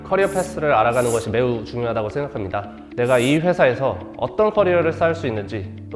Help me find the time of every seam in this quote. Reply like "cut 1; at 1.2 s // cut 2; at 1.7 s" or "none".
cut 1; at 2.8 s